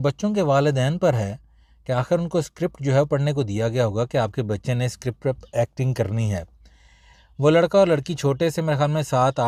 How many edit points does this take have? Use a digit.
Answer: 0